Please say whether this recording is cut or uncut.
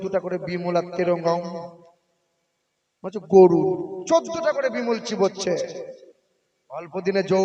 uncut